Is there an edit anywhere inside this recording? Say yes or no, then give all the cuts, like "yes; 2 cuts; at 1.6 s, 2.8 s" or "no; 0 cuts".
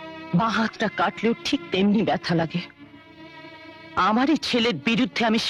no; 0 cuts